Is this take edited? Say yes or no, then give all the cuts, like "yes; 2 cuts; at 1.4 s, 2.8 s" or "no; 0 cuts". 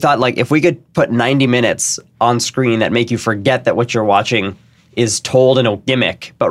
no; 0 cuts